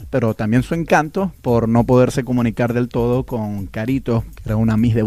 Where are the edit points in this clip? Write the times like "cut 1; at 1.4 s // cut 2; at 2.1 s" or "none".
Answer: none